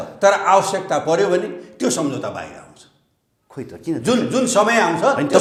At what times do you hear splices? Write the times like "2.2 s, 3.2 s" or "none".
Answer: none